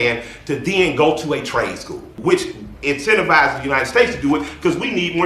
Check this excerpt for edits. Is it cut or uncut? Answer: cut